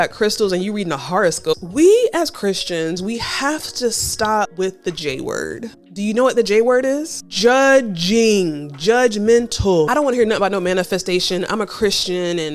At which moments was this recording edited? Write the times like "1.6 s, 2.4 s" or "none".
1.5 s, 4.5 s, 9.9 s